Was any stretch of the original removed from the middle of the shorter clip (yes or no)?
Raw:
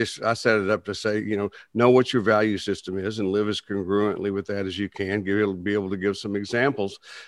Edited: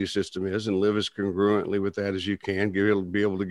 no